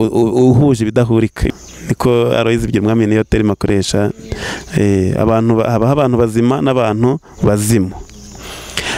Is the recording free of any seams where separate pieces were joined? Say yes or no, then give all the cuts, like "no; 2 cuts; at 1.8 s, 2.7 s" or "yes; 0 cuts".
no; 1 cut; at 1.4 s